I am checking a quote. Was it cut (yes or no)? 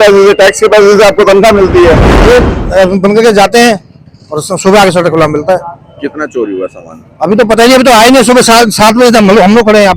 yes